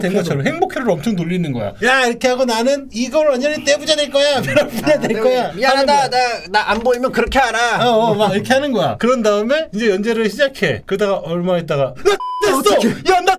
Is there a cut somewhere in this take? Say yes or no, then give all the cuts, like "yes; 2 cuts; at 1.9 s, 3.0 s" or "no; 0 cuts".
no; 0 cuts